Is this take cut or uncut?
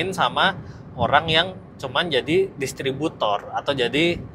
uncut